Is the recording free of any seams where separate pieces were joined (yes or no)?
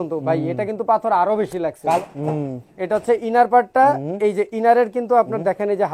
no